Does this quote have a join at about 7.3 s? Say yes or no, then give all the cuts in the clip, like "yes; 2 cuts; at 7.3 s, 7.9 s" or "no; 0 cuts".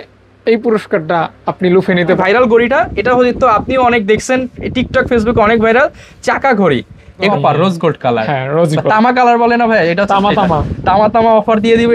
yes; 2 cuts; at 2.2 s, 7.3 s